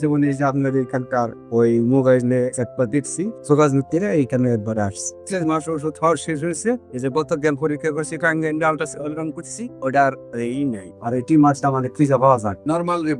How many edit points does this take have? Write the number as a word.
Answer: two